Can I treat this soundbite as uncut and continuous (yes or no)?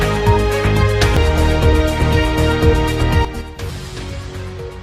yes